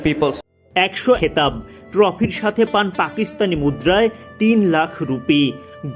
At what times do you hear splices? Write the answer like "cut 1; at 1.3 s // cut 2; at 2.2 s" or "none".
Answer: cut 1; at 1.2 s